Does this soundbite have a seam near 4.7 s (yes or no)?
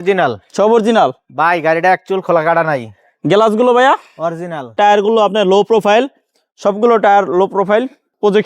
yes